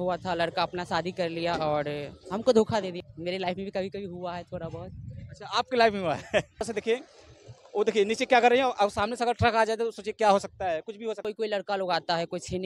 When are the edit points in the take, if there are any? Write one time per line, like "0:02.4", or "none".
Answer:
0:03.0
0:06.7
0:11.2